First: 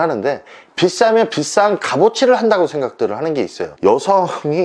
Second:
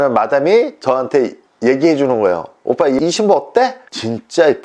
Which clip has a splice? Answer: first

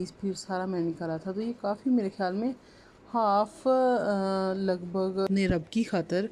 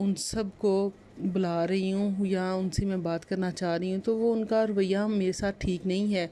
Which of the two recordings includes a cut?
first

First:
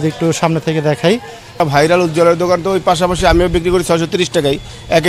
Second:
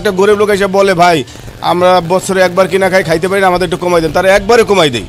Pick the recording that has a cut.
first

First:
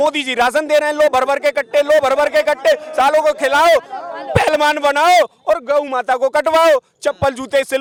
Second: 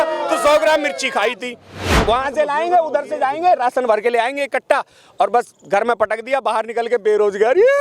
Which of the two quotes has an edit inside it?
second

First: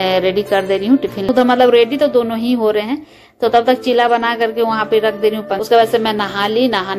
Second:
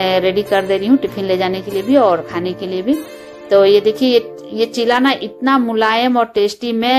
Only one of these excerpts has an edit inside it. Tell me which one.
first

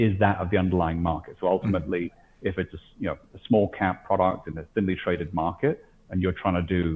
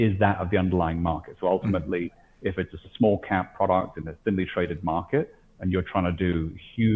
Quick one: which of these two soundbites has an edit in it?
second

